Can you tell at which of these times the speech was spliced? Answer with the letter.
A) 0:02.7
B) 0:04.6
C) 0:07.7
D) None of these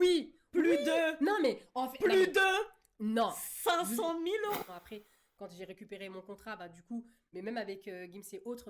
B